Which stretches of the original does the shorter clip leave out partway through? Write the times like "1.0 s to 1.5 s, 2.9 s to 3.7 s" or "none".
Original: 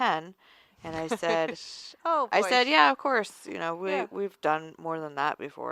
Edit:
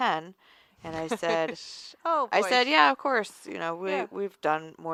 none